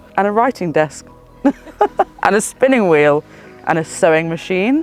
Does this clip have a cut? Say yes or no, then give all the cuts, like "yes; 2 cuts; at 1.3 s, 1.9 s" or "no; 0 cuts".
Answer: no; 0 cuts